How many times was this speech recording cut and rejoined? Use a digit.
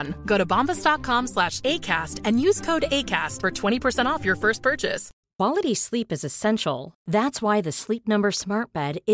1